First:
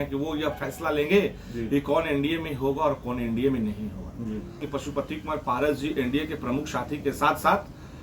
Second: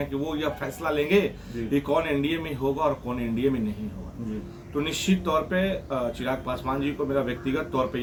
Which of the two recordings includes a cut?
first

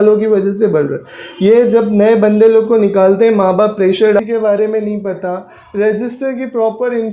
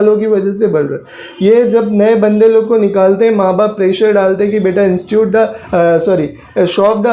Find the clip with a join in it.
first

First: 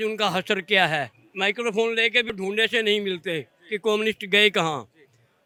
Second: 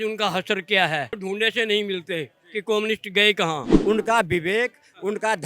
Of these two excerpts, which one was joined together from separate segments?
second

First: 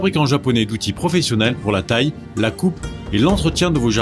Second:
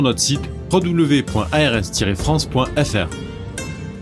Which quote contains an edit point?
second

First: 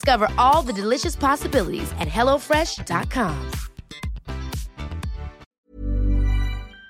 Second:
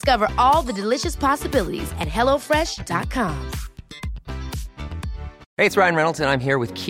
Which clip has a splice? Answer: second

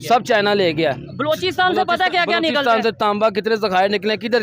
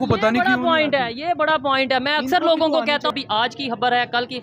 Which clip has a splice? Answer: second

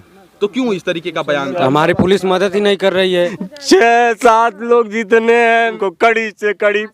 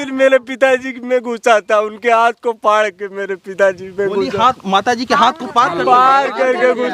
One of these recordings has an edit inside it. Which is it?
first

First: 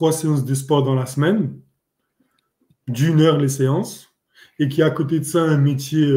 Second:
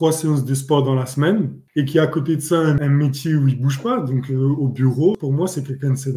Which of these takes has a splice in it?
second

